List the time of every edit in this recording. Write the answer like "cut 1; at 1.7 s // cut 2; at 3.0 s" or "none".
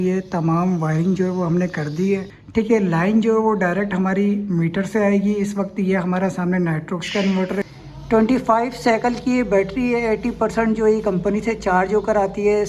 cut 1; at 2.4 s // cut 2; at 7.6 s